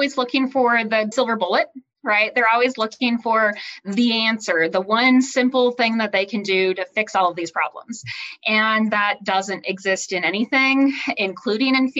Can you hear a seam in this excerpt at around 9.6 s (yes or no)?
no